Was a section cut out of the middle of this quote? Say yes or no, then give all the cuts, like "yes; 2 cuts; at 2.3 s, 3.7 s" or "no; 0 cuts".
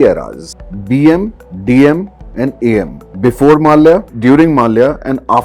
yes; 1 cut; at 4.1 s